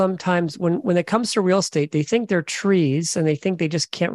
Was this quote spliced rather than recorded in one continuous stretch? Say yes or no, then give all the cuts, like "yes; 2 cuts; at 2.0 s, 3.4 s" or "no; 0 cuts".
no; 0 cuts